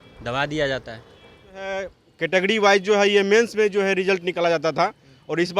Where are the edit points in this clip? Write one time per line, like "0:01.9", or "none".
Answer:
0:01.7

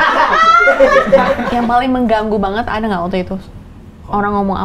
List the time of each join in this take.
0:01.4

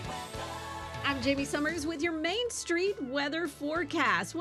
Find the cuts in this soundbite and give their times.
0:01.0

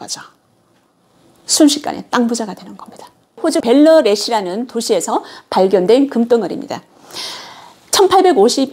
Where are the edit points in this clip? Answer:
0:03.4

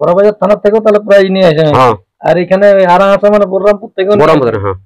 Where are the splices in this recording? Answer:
none

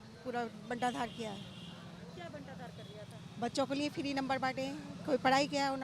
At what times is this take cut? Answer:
none

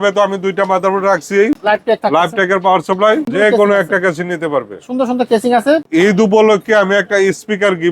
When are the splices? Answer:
0:01.6
0:03.3
0:05.9

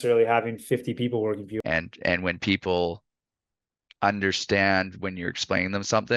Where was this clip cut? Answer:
0:01.5

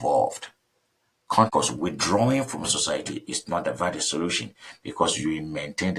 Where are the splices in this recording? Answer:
0:01.5

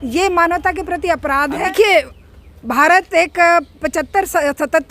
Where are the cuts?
0:01.7

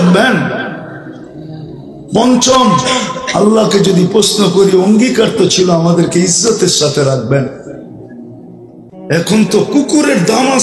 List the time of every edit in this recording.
none

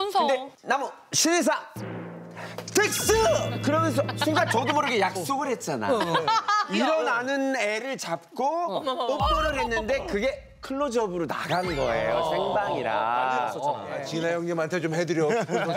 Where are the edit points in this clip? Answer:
0:14.0

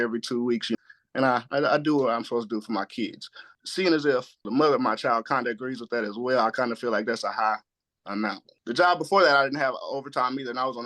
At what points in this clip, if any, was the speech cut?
0:03.5
0:08.5

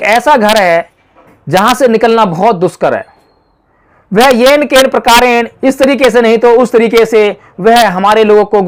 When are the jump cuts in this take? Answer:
none

